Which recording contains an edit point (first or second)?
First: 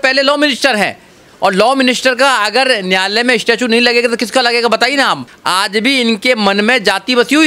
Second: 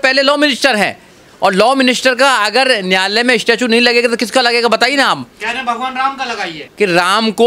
first